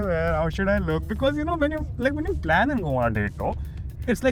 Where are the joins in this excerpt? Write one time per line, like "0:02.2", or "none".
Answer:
none

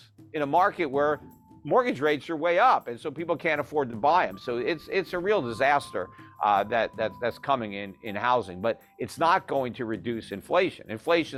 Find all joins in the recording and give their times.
none

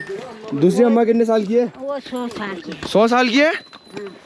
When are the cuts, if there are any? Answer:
none

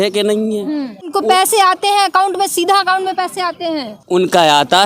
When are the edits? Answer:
0:01.1
0:04.0

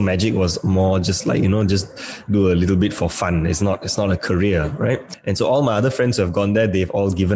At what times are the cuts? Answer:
0:05.1

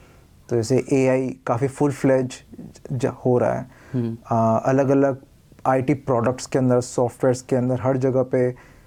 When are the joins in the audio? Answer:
none

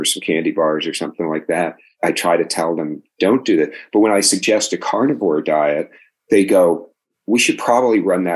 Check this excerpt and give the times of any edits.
0:01.9
0:07.1

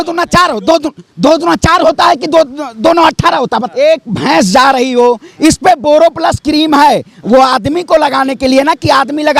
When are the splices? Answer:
0:03.7

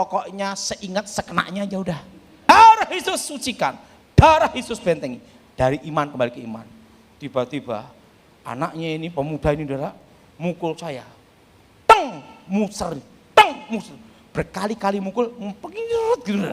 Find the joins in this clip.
0:02.5

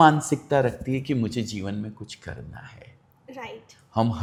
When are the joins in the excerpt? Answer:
none

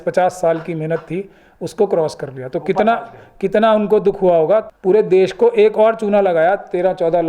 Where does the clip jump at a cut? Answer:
0:04.7

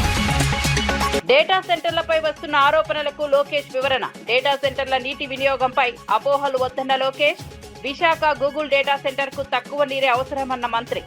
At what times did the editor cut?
0:01.1

